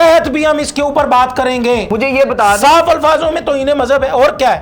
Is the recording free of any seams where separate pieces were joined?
no; 1 cut; at 1.8 s

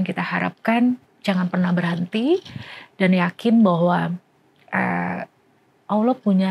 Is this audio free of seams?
yes; 0 cuts

